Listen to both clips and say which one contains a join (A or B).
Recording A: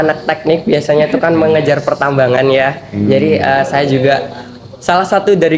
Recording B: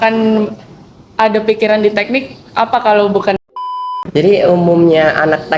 B